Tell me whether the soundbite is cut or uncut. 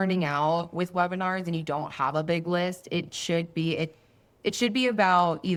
uncut